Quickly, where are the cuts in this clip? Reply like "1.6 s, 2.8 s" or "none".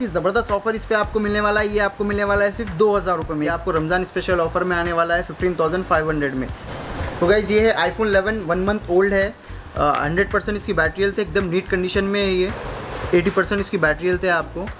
3.3 s, 6.6 s, 12.7 s